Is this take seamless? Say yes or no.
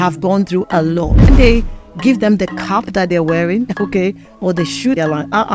no